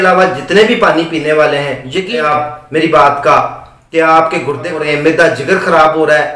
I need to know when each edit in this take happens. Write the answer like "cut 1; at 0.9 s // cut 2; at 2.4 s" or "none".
cut 1; at 2.2 s // cut 2; at 4.8 s